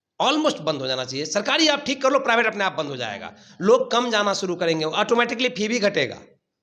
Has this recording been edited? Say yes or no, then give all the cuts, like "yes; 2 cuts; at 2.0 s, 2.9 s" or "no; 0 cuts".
no; 0 cuts